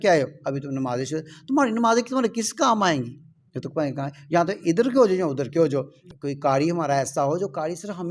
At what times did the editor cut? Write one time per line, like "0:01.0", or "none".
0:06.0